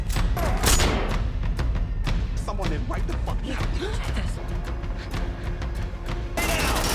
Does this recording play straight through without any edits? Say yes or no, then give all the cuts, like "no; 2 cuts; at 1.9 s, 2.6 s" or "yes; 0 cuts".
no; 1 cut; at 4.4 s